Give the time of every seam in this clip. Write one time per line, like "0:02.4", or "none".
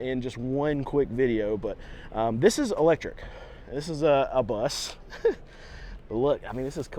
none